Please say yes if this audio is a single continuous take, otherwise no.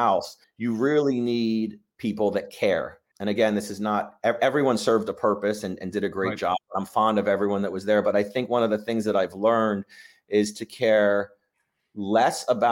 no